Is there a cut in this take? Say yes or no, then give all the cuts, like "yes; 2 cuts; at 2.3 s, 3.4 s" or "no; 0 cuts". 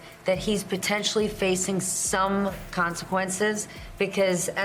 no; 0 cuts